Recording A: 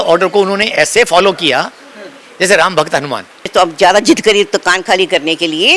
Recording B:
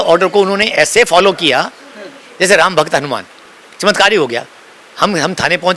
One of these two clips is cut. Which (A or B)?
A